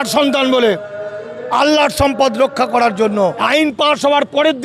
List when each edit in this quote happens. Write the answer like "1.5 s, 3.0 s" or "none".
3.4 s